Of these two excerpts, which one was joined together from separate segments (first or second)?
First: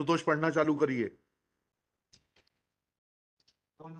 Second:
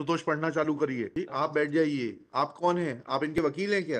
second